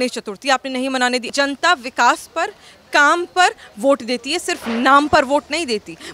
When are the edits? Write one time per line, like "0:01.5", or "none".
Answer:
0:01.3